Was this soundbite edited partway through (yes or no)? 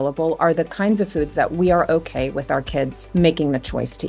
yes